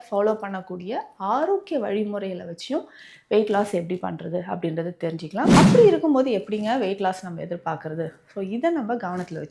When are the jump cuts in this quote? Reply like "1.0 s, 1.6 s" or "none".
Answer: 5.5 s